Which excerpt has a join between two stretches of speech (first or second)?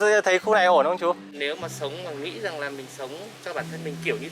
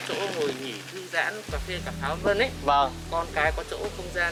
first